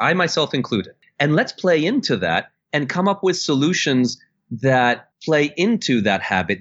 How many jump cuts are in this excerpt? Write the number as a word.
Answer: two